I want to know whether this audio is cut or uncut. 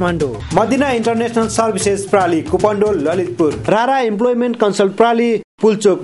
cut